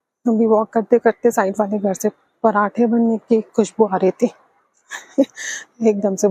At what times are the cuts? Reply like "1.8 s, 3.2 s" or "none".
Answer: none

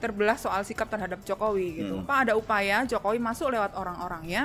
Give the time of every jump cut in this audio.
2.1 s

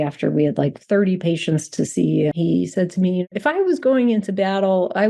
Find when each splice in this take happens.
2.3 s, 3.3 s

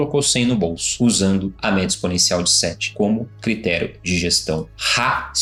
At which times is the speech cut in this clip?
none

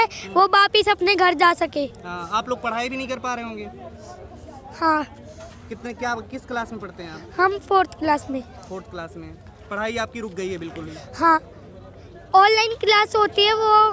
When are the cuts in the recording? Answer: none

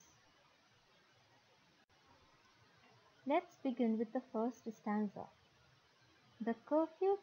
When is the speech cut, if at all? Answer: 1.9 s

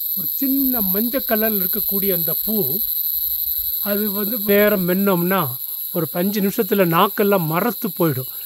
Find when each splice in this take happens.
4.5 s

